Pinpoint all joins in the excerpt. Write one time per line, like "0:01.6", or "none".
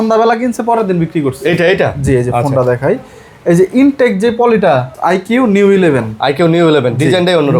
0:04.9